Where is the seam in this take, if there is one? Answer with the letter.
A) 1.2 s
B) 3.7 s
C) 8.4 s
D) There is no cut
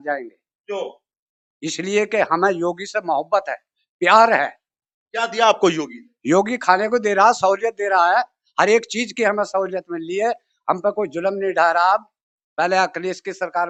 D